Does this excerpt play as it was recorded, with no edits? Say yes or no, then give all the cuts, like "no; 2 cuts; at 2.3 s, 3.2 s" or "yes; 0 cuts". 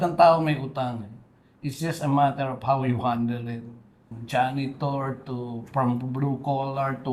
no; 1 cut; at 4.2 s